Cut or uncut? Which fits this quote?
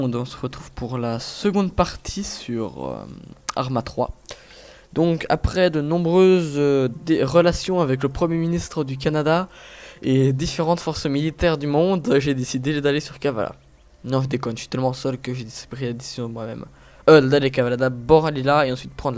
uncut